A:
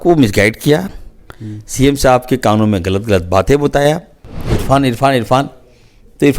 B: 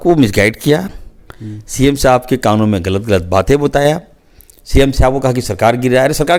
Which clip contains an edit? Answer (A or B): A